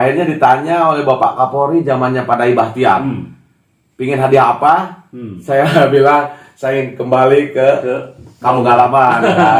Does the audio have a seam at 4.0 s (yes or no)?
no